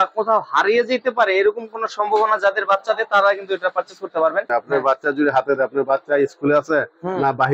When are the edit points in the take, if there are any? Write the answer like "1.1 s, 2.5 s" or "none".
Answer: 4.5 s